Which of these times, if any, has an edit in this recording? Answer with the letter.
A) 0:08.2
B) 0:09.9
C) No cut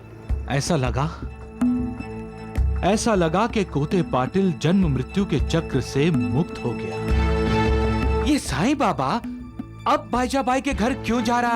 A